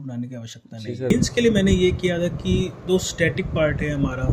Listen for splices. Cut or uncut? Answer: cut